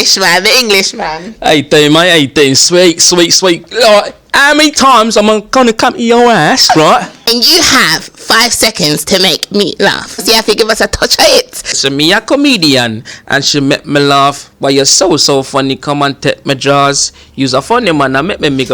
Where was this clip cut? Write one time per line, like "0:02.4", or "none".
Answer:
0:07.2
0:10.2
0:11.8